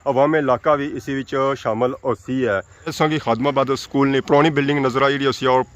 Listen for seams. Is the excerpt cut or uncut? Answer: cut